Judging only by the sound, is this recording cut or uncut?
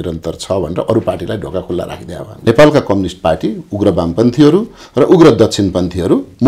cut